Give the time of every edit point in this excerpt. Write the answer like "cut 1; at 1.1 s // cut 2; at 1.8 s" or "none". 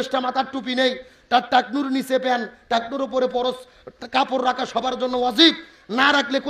none